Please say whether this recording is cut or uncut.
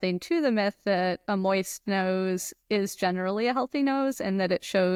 uncut